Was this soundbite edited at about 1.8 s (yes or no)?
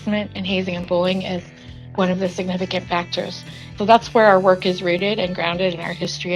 yes